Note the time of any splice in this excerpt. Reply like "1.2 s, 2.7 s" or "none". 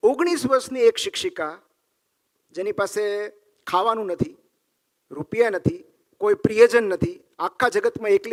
none

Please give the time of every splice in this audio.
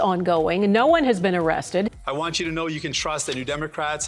2.0 s

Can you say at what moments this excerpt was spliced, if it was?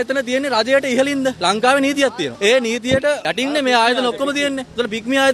2.3 s, 3.3 s

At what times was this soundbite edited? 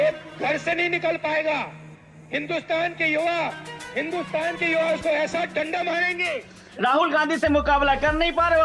6.7 s

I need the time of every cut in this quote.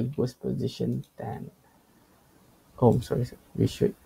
none

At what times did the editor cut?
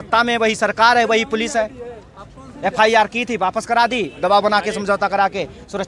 none

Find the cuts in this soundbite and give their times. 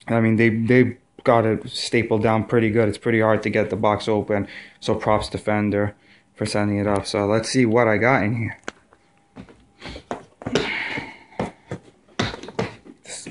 none

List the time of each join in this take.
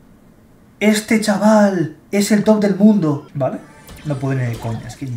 3.3 s

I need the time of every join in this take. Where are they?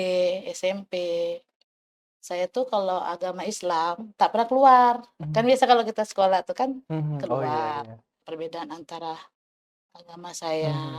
8.2 s

